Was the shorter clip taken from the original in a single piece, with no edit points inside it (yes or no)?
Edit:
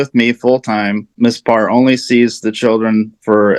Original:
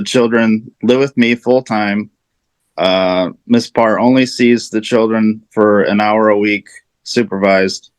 no